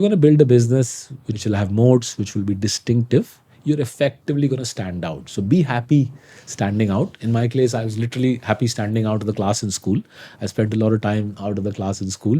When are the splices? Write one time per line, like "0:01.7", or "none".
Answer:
0:01.3